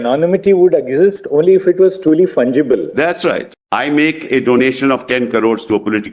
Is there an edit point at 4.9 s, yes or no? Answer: no